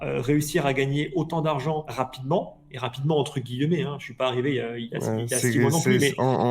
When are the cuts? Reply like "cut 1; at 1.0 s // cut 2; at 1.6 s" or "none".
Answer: cut 1; at 1.9 s